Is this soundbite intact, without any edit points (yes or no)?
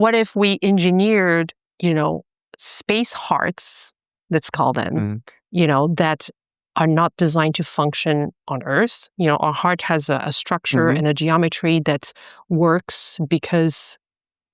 yes